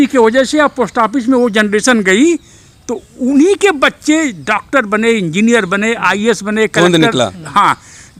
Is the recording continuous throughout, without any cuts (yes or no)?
yes